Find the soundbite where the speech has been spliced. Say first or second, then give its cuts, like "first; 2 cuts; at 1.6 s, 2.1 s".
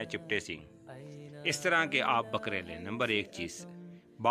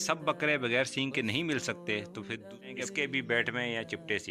second; 1 cut; at 2.4 s